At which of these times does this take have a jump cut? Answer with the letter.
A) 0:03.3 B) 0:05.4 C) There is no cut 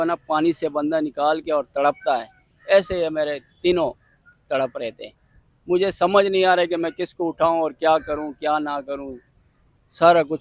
C